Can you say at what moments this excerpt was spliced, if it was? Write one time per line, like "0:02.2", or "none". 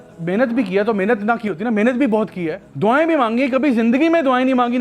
0:02.6